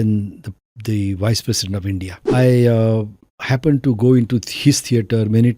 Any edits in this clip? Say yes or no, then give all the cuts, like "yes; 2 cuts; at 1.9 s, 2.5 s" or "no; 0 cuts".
yes; 1 cut; at 2.1 s